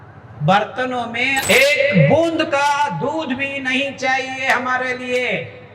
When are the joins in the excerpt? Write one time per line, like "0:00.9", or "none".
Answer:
0:01.4